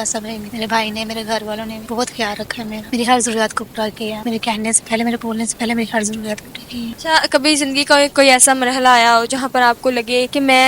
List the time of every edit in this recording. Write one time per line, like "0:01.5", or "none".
none